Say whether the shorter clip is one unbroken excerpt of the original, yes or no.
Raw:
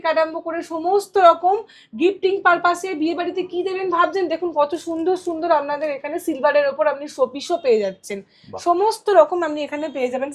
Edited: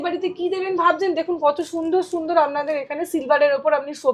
yes